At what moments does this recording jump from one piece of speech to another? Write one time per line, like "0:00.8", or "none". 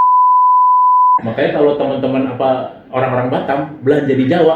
0:01.1